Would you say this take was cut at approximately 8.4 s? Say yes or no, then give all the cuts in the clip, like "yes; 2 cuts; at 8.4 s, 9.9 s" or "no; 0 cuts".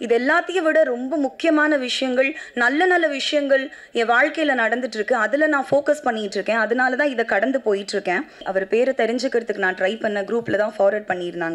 yes; 1 cut; at 8.4 s